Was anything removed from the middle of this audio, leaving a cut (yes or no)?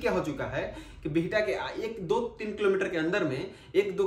no